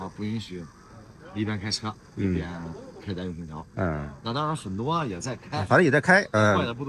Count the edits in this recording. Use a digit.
0